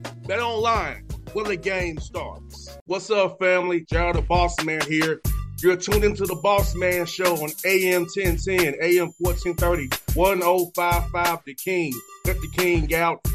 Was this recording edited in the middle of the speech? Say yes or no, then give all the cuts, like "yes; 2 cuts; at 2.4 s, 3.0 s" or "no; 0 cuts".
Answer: no; 0 cuts